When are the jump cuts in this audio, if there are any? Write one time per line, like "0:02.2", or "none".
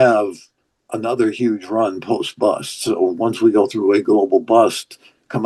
none